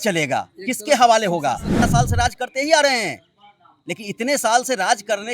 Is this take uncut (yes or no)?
no